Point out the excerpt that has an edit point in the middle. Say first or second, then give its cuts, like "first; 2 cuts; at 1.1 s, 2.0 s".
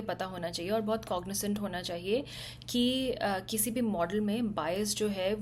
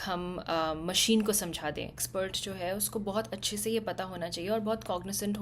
second; 1 cut; at 2.0 s